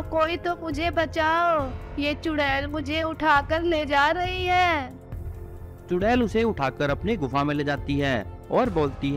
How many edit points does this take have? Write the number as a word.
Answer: zero